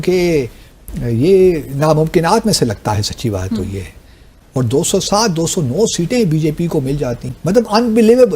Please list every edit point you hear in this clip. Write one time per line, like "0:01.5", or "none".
0:04.4